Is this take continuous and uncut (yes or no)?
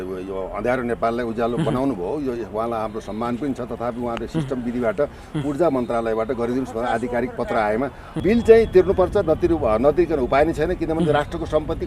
no